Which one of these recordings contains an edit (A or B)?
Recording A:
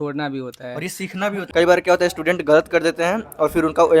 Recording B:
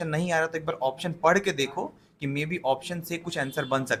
A